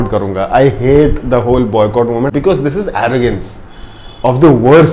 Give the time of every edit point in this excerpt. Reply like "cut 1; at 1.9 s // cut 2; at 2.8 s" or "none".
cut 1; at 2.3 s